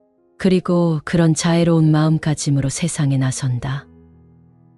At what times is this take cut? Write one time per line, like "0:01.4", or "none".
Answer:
none

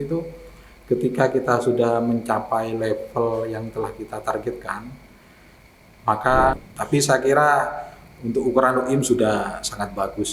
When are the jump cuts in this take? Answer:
0:06.6

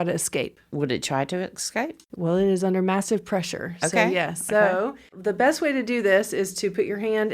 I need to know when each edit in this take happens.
0:05.1

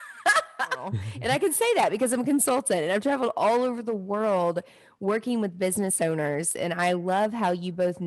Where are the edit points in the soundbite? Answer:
0:01.1
0:06.5

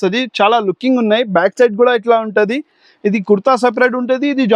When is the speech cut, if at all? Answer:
none

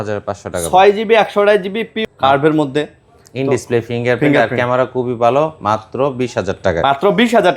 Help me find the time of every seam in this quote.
0:01.9

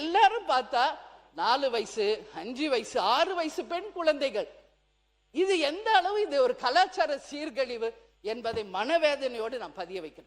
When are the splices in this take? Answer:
none

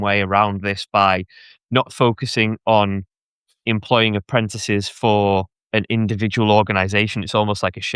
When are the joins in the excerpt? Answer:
none

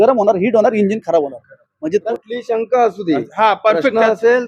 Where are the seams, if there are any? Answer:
0:02.0

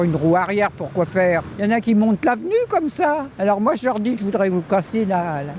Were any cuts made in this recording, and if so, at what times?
0:01.8
0:03.3

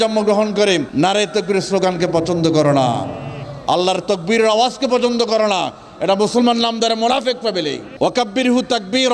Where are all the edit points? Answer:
0:00.9
0:07.9

